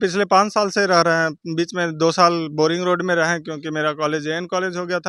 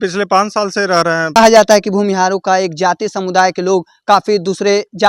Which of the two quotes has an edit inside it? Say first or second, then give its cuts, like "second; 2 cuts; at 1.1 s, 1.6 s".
second; 1 cut; at 1.4 s